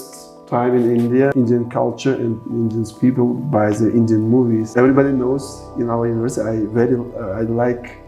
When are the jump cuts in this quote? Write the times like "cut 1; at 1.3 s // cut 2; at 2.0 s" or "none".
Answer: cut 1; at 1.3 s // cut 2; at 4.7 s